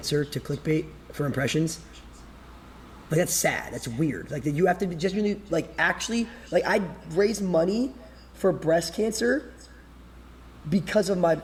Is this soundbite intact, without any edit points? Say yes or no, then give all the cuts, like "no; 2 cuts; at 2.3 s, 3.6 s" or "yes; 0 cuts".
yes; 0 cuts